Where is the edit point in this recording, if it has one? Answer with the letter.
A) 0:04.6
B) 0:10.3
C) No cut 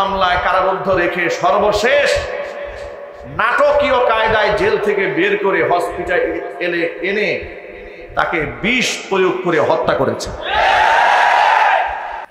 C